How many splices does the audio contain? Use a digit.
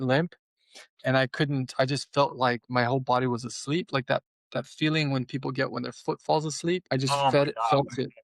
1